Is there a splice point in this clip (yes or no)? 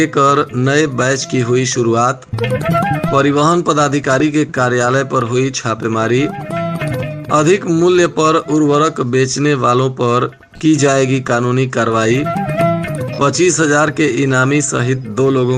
no